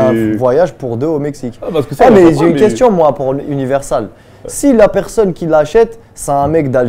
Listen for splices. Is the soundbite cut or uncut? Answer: uncut